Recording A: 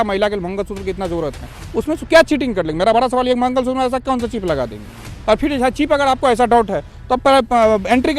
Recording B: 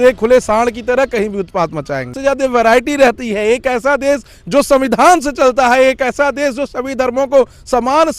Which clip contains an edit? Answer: B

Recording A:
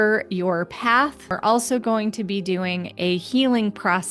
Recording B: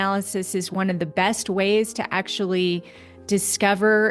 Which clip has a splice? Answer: A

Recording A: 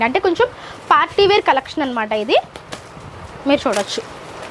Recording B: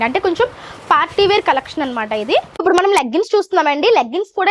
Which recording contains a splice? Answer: B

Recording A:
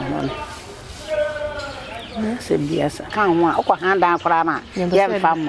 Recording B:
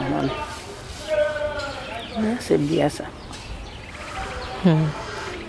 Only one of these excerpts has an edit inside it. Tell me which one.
A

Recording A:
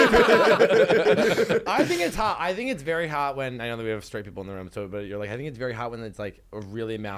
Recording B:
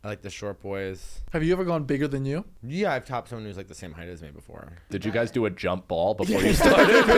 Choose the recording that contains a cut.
B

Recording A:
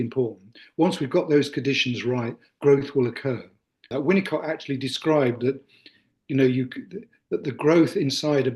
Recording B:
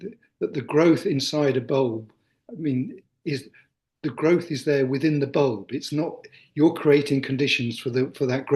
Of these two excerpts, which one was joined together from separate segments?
A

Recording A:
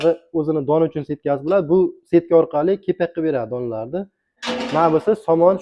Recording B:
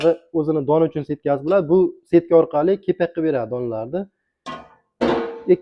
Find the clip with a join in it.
A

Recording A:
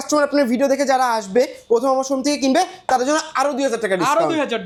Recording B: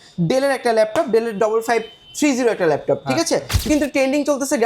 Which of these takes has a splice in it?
B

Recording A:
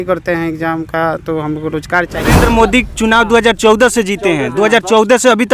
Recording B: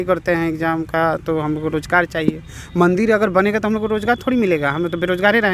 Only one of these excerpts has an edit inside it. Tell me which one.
A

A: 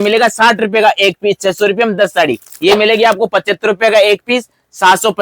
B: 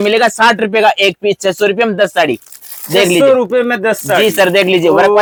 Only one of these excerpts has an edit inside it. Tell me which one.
A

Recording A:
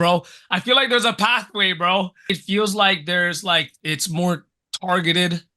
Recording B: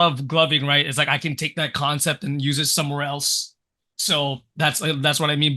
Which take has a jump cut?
A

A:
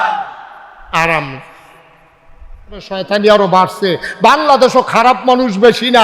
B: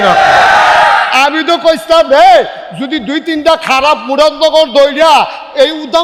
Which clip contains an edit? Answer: A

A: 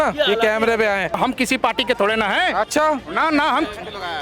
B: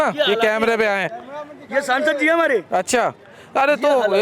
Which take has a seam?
A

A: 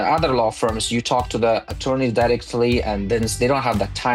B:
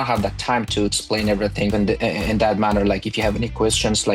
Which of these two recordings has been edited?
B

